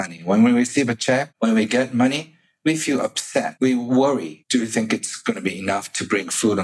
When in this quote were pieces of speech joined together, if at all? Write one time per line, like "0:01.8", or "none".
0:01.3
0:03.5
0:04.4